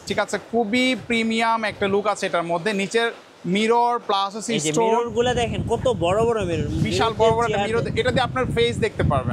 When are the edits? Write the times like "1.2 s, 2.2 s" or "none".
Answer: none